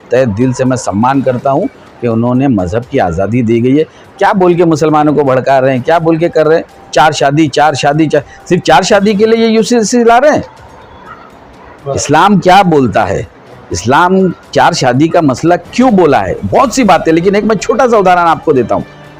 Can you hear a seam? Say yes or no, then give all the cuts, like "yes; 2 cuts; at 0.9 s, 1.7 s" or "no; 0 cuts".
no; 0 cuts